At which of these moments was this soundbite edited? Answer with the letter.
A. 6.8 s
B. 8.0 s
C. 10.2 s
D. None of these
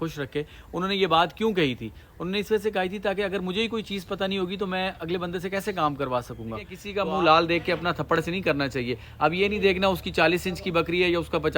A